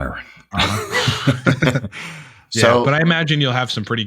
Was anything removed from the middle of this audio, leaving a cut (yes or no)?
no